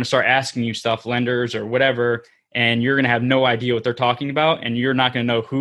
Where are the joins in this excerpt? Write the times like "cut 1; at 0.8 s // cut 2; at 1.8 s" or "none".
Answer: none